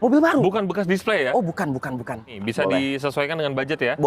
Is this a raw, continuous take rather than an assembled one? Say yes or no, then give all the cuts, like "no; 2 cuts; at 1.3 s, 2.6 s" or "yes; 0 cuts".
no; 1 cut; at 2.3 s